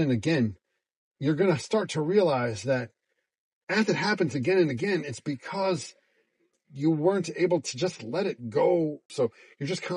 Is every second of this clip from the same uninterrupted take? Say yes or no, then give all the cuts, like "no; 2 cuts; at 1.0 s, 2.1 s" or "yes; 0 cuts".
no; 1 cut; at 9.0 s